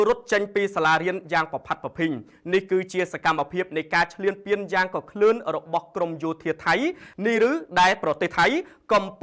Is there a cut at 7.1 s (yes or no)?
yes